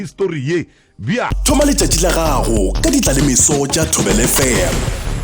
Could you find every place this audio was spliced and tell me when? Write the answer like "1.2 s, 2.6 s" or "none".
1.4 s